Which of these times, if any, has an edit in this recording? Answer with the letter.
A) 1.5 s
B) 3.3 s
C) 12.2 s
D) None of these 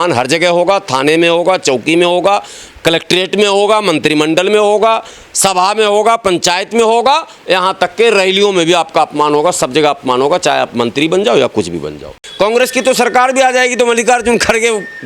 C